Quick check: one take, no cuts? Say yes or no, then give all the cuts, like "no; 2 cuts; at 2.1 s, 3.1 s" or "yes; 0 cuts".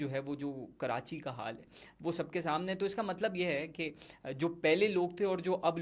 yes; 0 cuts